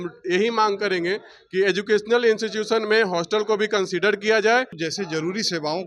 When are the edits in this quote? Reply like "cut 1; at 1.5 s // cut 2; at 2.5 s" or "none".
cut 1; at 4.8 s